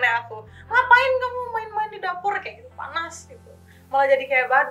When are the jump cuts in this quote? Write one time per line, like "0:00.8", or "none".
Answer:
0:03.7